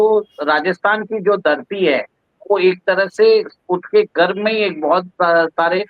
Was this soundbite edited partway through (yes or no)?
no